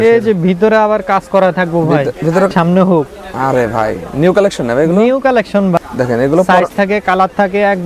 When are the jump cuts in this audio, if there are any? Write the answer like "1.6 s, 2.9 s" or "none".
2.5 s, 5.8 s